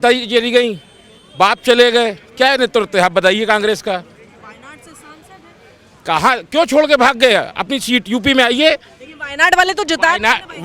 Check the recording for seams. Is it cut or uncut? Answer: uncut